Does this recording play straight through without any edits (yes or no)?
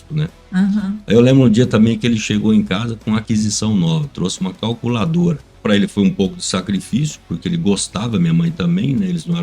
no